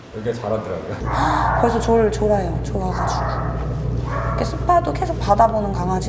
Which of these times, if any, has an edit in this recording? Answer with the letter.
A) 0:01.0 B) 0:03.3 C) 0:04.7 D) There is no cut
A